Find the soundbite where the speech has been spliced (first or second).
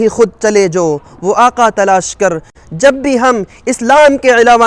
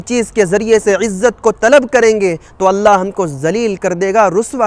first